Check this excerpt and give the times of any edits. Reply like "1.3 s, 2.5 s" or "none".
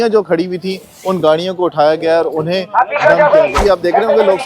3.6 s

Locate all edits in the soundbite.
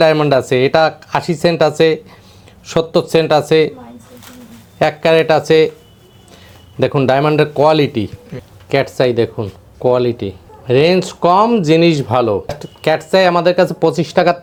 none

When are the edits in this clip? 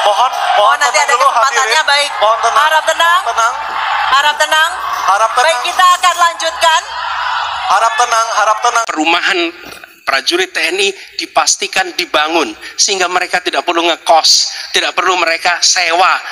8.9 s

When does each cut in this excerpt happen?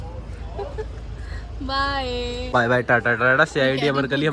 2.5 s

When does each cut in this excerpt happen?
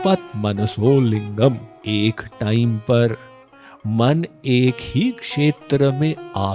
1.7 s

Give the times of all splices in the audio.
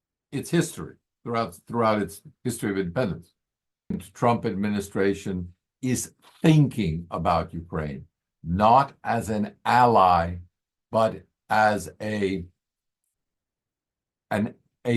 4.1 s

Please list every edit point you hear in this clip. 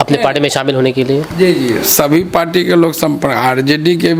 none

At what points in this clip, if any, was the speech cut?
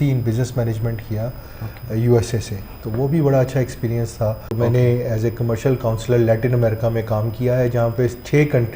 4.4 s

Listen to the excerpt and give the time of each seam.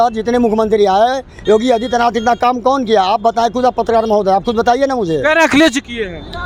none

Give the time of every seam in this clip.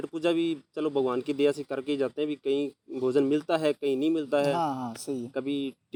none

